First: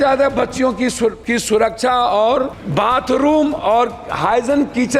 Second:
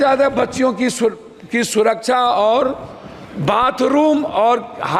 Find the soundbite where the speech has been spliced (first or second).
first